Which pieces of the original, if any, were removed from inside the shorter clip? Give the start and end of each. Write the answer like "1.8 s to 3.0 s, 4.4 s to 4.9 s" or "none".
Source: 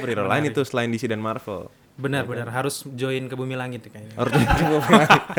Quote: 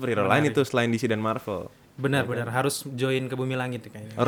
none